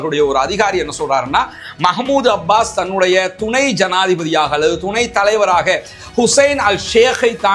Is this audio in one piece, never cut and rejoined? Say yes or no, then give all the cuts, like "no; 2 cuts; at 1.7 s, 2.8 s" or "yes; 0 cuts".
yes; 0 cuts